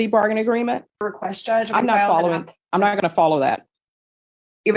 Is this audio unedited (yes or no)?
no